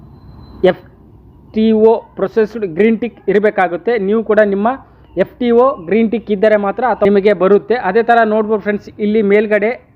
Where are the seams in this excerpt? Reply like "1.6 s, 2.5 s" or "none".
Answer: 7.1 s